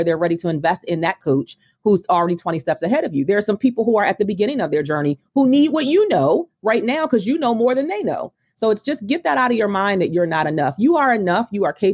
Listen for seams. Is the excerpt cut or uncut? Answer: uncut